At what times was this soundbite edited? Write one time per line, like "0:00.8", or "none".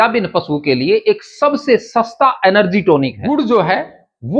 0:03.2